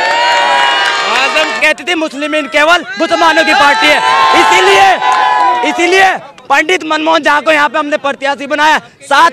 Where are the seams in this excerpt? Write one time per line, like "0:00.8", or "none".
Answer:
0:01.6